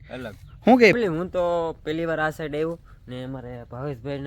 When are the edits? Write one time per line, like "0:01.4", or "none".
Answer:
0:00.9